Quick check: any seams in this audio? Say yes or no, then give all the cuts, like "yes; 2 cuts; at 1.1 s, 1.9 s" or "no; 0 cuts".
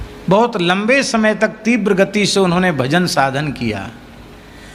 no; 0 cuts